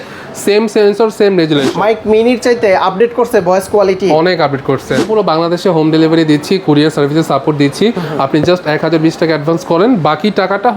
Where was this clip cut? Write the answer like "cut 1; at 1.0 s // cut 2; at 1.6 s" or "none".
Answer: cut 1; at 1.8 s // cut 2; at 5.1 s

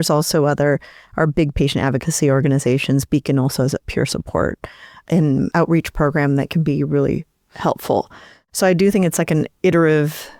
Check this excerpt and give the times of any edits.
none

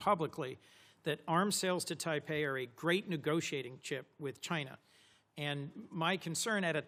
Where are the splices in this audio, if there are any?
none

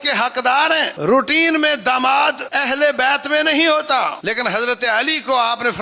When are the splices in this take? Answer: cut 1; at 0.9 s // cut 2; at 2.4 s // cut 3; at 4.2 s

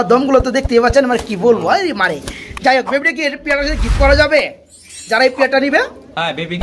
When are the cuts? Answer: none

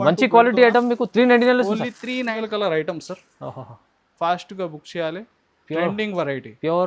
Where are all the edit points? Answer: cut 1; at 2.3 s

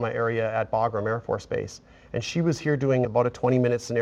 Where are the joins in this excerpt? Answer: cut 1; at 3.1 s

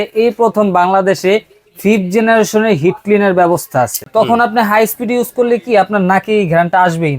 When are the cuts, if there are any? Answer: cut 1; at 4.0 s

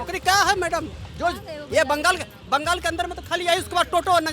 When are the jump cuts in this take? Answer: none

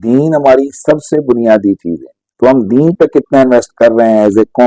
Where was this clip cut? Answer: none

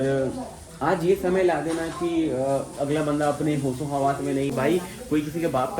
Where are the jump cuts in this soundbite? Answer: cut 1; at 4.5 s

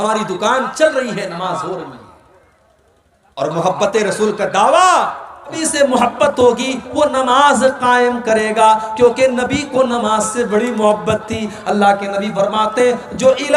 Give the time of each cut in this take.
cut 1; at 5.6 s

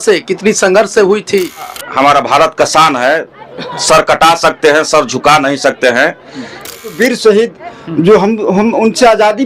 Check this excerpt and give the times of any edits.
cut 1; at 1.8 s // cut 2; at 6.9 s

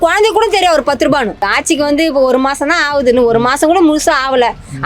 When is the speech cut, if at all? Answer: cut 1; at 1.5 s

